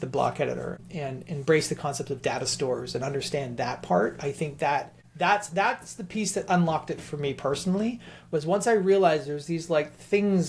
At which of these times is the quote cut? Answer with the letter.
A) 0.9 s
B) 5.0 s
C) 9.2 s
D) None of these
B